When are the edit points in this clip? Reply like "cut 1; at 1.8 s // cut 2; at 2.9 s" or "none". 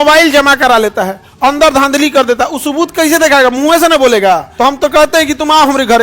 cut 1; at 4.5 s